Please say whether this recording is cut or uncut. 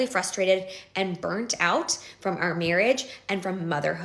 uncut